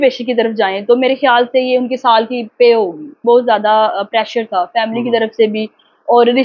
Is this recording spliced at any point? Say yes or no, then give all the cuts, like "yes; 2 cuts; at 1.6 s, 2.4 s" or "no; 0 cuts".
yes; 1 cut; at 3.2 s